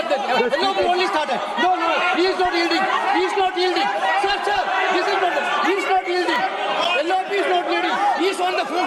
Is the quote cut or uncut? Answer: uncut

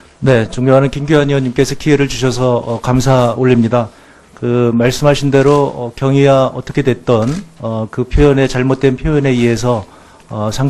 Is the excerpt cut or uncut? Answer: uncut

